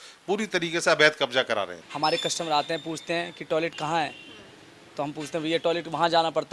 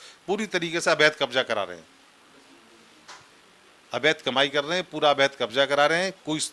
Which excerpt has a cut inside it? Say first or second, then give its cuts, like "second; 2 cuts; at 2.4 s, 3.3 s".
first; 1 cut; at 1.8 s